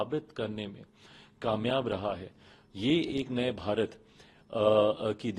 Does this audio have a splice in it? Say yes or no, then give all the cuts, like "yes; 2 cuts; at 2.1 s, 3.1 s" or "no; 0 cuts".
no; 0 cuts